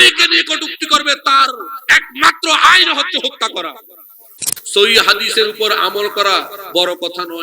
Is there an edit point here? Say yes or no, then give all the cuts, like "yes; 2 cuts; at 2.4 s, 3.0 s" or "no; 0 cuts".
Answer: yes; 1 cut; at 4.5 s